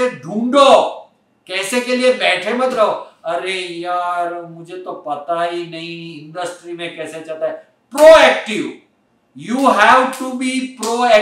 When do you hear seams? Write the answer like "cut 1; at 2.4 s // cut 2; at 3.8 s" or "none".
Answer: none